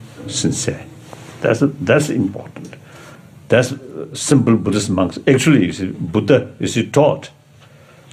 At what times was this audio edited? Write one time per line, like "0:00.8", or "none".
none